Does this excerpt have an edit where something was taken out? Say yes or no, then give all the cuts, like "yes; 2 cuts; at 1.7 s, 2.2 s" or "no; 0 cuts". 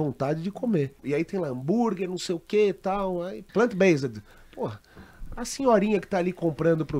yes; 2 cuts; at 1.0 s, 3.4 s